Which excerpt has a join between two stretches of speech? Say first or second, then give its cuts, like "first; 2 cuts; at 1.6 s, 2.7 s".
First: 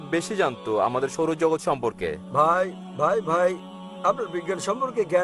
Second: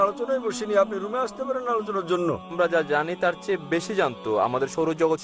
second; 1 cut; at 2.5 s